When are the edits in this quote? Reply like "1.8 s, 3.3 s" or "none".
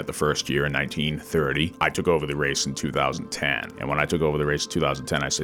1.7 s, 3.7 s